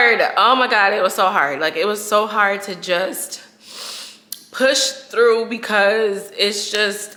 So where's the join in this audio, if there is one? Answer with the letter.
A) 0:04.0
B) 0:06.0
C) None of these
C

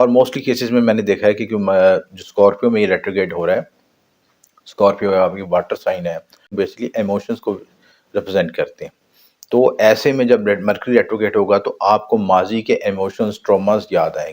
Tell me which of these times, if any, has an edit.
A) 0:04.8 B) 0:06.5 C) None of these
B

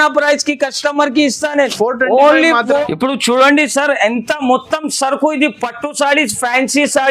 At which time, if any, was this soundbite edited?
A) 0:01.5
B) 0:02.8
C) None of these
B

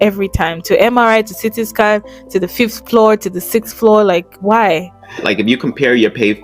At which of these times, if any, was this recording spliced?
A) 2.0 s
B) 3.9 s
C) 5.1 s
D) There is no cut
C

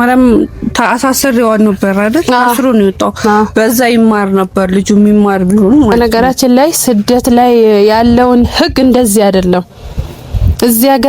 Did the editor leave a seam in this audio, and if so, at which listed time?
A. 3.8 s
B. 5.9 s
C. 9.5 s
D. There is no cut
B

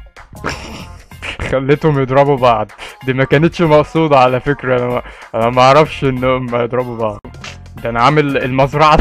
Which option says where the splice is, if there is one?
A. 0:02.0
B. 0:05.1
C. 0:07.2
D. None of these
C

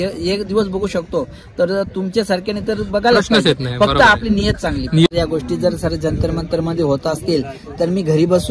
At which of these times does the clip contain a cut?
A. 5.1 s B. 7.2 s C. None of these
A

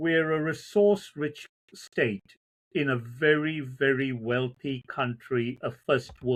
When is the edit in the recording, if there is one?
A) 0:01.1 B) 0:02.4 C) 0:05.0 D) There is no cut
D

